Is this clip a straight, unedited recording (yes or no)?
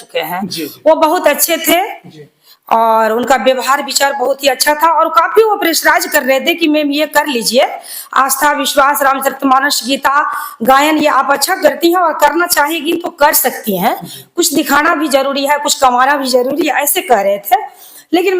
yes